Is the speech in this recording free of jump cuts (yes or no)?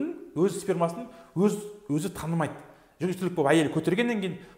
yes